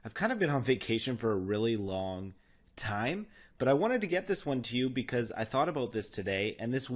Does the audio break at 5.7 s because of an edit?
no; 1 cut; at 3.1 s

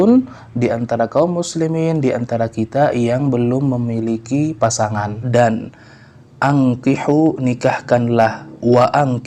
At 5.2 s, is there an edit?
yes; 1 cut; at 5.2 s

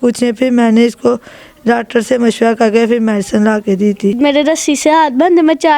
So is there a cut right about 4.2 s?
yes; 1 cut; at 4.2 s

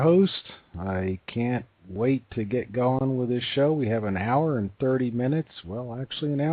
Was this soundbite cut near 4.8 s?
yes; 1 cut; at 4.8 s

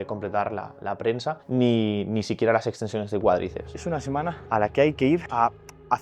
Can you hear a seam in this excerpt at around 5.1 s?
no; 1 cut; at 3.7 s

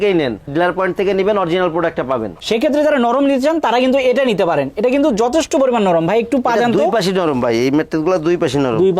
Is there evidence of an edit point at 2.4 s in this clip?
yes; 1 cut; at 2.4 s

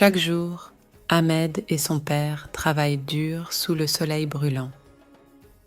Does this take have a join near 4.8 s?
yes; 1 cut; at 4.8 s

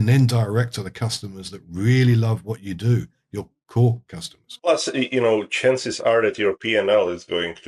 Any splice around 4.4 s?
no; 0 cuts

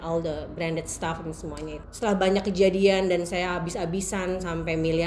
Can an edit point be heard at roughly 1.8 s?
yes; 1 cut; at 1.8 s

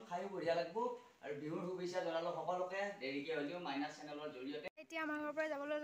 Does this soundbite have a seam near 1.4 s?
no; 1 cut; at 4.7 s

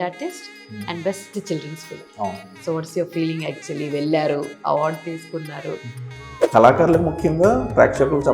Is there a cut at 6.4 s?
yes; 1 cut; at 6.4 s

